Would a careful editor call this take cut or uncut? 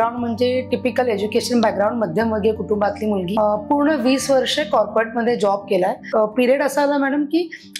cut